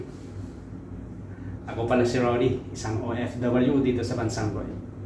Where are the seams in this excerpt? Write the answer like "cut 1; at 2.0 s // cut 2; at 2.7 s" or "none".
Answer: none